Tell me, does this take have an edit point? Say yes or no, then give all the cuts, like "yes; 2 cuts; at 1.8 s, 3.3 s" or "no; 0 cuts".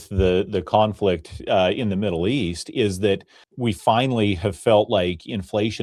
no; 0 cuts